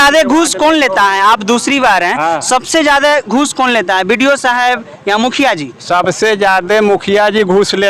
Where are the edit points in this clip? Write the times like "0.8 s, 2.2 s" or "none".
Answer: none